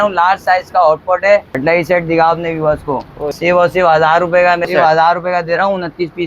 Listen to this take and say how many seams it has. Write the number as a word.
three